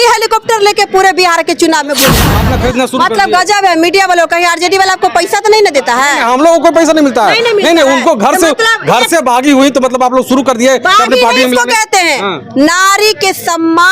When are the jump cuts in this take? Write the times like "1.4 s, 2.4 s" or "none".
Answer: 2.3 s